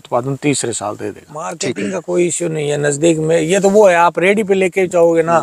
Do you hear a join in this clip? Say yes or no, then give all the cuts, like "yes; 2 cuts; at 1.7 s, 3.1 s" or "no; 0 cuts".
yes; 1 cut; at 1.5 s